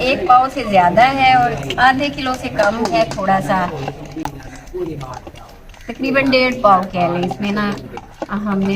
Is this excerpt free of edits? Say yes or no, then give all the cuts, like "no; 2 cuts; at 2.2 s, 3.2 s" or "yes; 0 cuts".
yes; 0 cuts